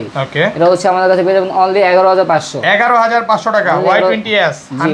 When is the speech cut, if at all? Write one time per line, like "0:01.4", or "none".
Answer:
none